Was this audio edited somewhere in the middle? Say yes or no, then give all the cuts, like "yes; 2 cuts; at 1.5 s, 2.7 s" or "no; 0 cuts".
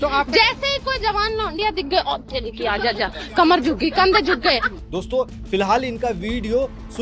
no; 0 cuts